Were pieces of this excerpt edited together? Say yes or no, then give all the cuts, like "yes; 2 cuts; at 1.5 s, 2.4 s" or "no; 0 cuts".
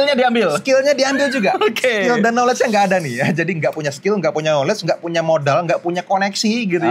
no; 0 cuts